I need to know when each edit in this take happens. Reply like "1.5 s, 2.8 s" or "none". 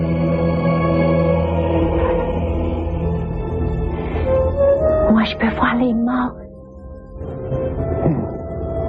6.3 s